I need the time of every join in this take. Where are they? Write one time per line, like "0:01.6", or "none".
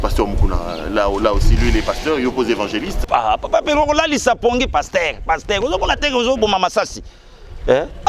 0:02.9

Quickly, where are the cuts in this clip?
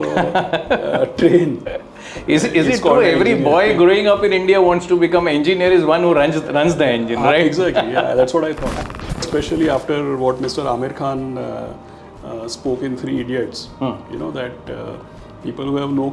0:08.9

